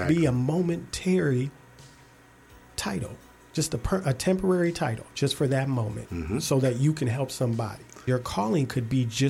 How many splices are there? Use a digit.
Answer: 1